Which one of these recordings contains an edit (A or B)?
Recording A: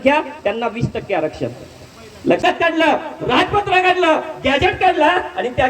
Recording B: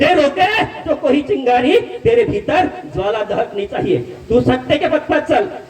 A